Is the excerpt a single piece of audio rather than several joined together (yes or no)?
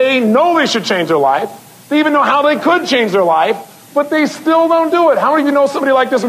yes